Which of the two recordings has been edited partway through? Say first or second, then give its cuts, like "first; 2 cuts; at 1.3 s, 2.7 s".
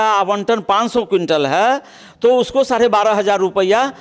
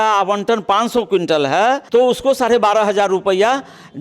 second; 1 cut; at 1.8 s